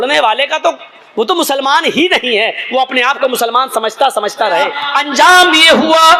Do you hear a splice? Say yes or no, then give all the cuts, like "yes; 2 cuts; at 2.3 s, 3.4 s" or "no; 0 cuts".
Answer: yes; 1 cut; at 4.9 s